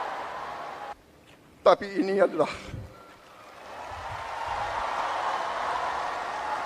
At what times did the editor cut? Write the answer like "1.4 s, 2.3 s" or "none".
0.9 s